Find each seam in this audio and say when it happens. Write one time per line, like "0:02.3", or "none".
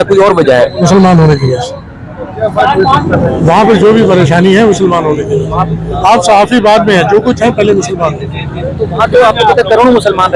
none